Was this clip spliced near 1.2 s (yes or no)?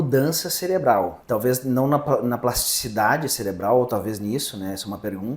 yes